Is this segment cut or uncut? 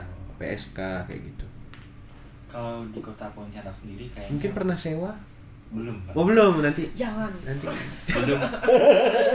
uncut